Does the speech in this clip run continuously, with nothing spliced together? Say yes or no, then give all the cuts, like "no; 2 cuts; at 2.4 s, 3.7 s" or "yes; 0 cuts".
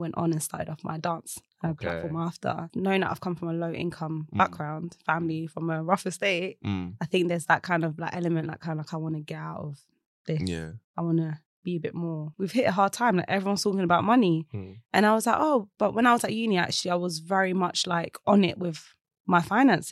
no; 2 cuts; at 2.7 s, 12.2 s